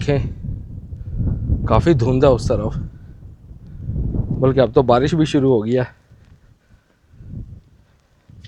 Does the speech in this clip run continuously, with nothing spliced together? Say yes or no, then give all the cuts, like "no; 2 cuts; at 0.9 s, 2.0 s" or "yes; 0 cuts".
yes; 0 cuts